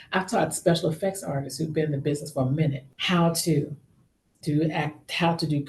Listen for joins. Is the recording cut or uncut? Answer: cut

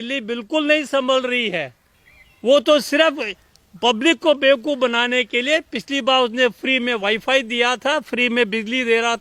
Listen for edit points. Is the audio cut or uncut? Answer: uncut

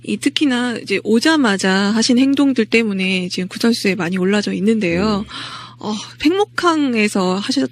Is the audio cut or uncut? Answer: uncut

